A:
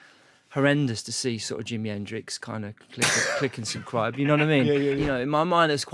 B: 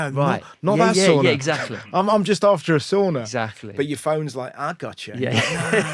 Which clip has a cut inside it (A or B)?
A